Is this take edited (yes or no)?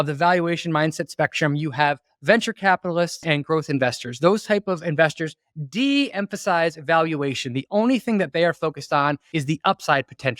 yes